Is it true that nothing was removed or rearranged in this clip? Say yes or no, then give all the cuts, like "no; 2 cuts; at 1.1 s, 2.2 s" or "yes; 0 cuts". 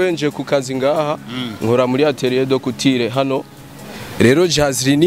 yes; 0 cuts